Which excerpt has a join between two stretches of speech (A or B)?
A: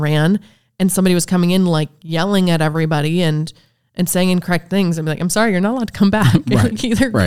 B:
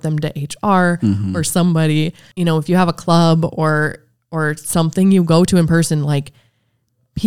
B